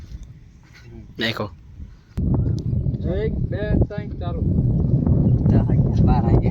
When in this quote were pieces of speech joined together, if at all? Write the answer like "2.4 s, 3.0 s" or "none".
2.2 s